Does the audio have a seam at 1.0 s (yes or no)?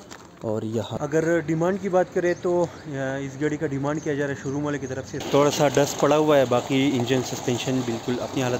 yes